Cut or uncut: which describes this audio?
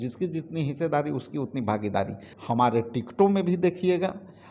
cut